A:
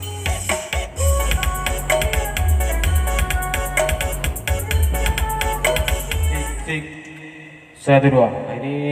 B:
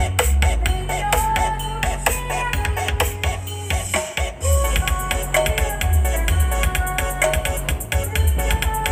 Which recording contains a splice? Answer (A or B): A